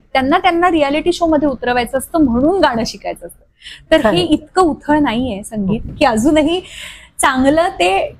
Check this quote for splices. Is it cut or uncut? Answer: cut